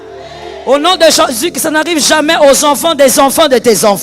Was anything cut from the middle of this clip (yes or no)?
no